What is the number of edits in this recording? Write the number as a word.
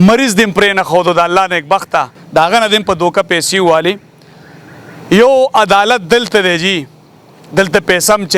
one